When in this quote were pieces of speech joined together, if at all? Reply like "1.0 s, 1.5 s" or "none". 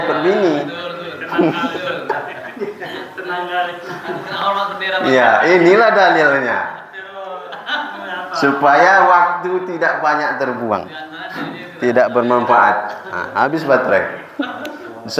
none